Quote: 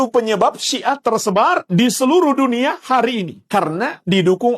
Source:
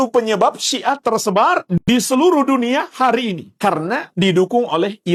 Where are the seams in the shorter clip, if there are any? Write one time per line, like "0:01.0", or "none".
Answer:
0:01.8